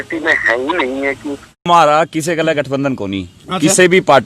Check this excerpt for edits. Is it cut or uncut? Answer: cut